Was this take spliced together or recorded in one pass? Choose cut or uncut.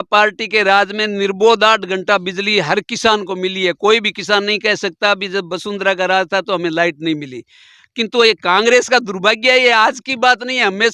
uncut